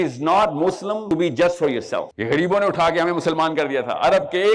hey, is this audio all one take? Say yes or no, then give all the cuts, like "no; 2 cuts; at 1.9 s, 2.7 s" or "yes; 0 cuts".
no; 2 cuts; at 1.0 s, 2.1 s